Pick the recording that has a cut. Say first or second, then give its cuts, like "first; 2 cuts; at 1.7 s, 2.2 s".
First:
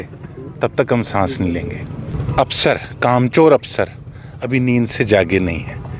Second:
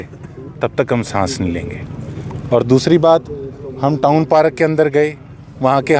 first; 1 cut; at 2.1 s